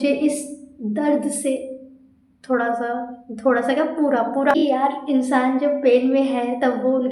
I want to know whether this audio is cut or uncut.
cut